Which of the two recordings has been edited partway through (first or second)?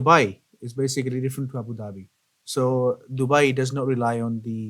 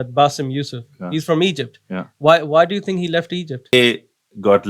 second